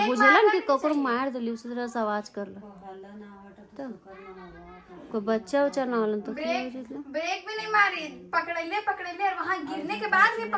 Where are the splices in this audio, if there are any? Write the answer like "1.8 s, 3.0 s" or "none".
none